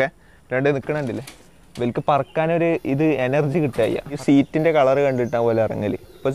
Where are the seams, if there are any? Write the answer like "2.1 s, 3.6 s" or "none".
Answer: 4.2 s

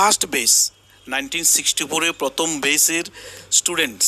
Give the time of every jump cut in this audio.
none

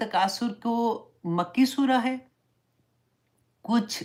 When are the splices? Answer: none

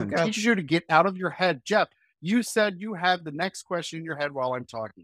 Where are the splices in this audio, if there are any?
none

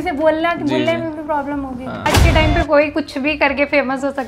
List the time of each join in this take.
2.1 s

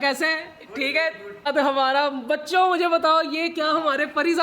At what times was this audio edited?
1.5 s

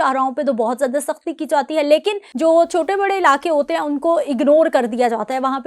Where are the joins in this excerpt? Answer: 2.3 s

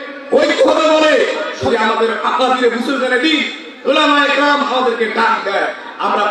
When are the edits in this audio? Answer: 1.7 s

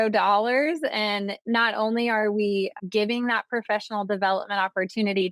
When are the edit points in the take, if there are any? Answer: 1.4 s, 2.8 s

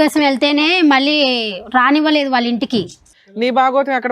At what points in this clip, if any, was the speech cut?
3.1 s

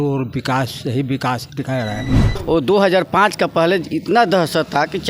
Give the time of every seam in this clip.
2.4 s

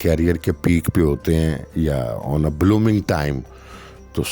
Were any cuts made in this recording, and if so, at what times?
none

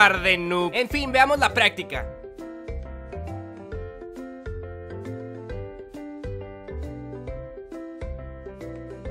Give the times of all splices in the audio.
6.9 s

